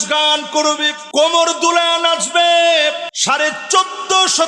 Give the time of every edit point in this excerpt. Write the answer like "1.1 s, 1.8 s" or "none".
0.9 s, 3.1 s